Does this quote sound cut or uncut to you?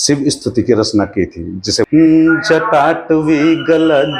cut